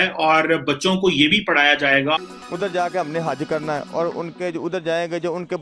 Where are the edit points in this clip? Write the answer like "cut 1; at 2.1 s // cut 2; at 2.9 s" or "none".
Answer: cut 1; at 2.2 s